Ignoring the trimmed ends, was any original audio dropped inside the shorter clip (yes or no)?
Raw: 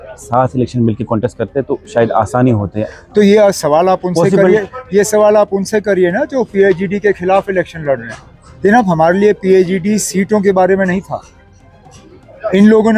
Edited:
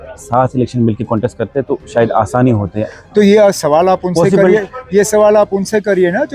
no